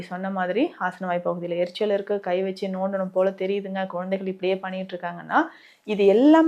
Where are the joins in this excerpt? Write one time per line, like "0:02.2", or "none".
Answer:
none